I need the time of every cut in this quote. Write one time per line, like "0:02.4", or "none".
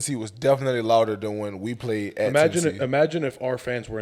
none